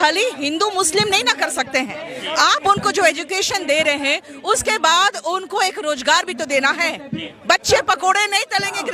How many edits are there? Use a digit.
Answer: 0